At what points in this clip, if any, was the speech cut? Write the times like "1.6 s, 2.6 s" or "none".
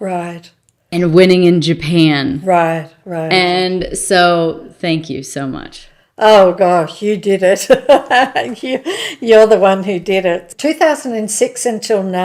10.5 s